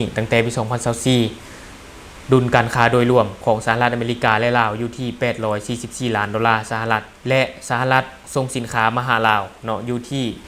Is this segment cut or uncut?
uncut